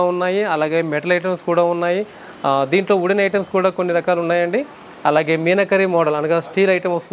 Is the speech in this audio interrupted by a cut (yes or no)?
no